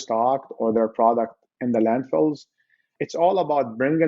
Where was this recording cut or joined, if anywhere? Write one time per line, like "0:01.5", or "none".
0:03.0